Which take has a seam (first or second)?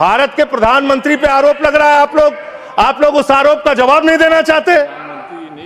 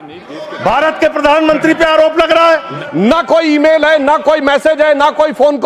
second